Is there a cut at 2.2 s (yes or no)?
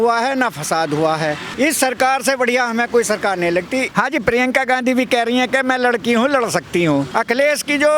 no